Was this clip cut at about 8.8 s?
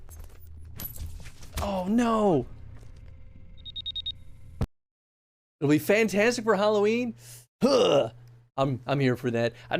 no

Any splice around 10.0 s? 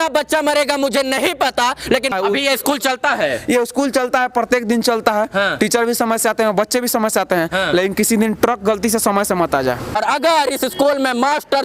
yes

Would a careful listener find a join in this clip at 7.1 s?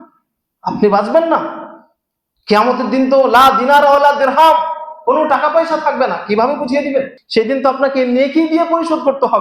yes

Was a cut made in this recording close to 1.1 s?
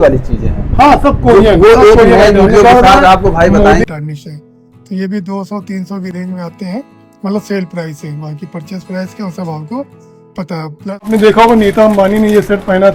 no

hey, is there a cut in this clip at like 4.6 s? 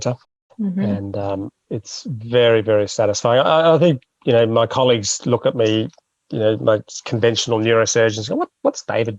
no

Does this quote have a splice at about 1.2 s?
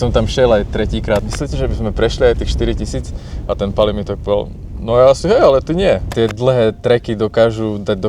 yes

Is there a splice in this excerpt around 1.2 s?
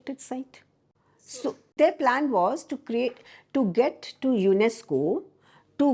yes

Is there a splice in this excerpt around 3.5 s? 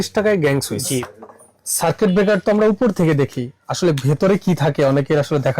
no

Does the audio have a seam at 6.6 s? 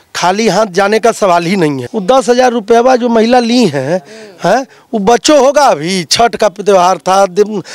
no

